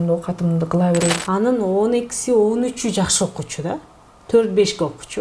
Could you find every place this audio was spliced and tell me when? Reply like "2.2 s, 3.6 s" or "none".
1.2 s

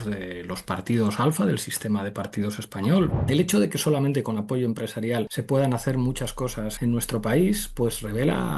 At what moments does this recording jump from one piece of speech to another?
3.2 s, 5.4 s, 6.7 s

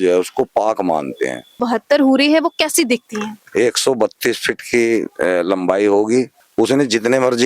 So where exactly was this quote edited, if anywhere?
1.6 s, 6.3 s

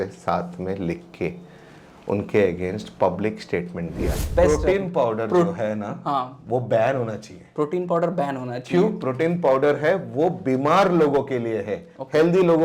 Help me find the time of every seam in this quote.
4.3 s

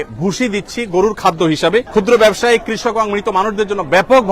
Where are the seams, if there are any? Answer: 1.9 s

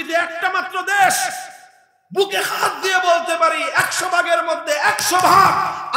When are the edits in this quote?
none

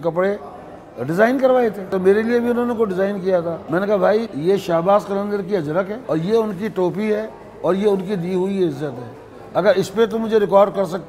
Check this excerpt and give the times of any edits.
1.9 s, 3.6 s, 4.3 s, 6.0 s

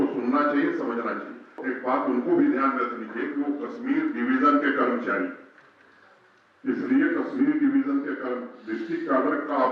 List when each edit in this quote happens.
1.6 s

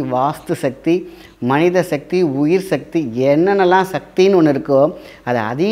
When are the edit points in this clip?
none

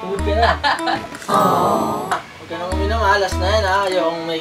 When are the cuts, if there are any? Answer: 2.3 s

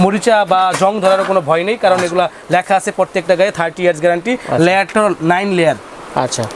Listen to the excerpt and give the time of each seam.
none

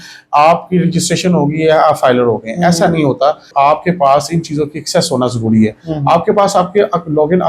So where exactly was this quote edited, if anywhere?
3.5 s

